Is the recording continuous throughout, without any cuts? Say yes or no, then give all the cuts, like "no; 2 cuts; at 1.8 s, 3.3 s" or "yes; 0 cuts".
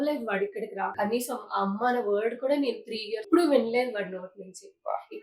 no; 2 cuts; at 0.9 s, 3.2 s